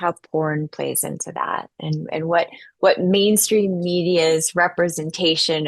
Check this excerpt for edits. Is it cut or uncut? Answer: uncut